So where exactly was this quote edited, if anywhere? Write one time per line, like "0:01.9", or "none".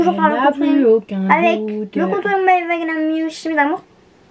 none